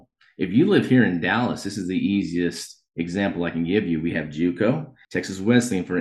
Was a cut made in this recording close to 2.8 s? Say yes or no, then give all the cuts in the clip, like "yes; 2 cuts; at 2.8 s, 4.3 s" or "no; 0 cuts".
no; 1 cut; at 5.0 s